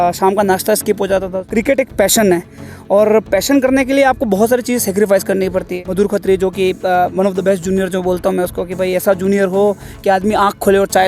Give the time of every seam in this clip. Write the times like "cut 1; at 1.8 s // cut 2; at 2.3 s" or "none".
cut 1; at 1.5 s // cut 2; at 5.8 s